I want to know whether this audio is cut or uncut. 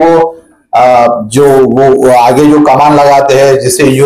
uncut